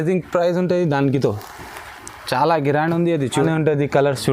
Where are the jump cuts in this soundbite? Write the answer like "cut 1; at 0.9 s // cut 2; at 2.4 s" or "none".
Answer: cut 1; at 3.4 s